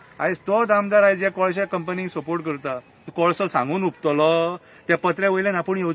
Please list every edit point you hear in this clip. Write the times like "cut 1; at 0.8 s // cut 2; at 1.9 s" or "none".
cut 1; at 3.1 s